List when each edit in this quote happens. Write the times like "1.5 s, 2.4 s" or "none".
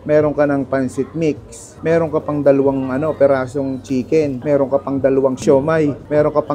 4.4 s, 5.4 s